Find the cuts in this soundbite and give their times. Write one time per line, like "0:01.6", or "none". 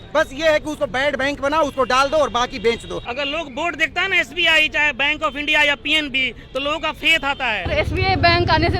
0:03.0
0:07.7

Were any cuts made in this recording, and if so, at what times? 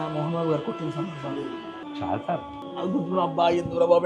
0:01.8
0:02.6

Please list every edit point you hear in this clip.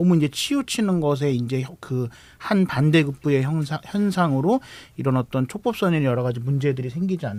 none

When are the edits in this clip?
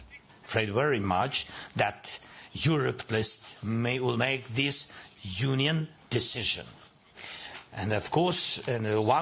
none

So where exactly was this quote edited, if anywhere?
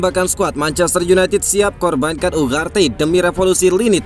none

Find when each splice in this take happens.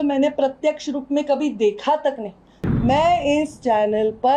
0:02.5

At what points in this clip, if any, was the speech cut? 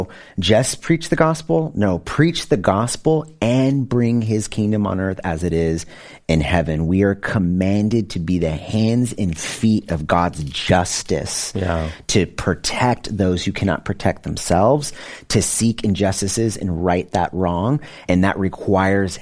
0:18.0

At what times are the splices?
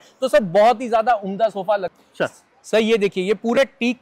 0:01.9

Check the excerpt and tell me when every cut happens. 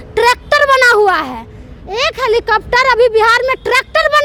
none

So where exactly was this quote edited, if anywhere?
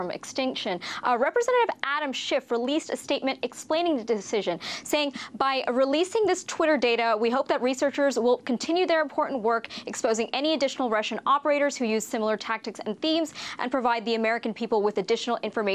0:06.0

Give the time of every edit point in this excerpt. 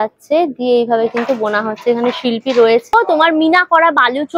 0:02.9

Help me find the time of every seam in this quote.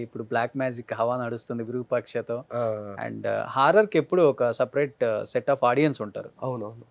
none

